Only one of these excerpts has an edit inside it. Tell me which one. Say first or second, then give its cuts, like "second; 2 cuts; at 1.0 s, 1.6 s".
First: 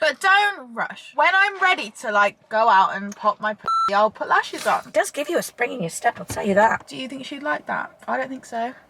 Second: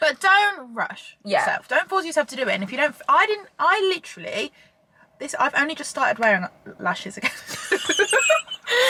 first; 4 cuts; at 1.1 s, 4.9 s, 6.8 s, 7.9 s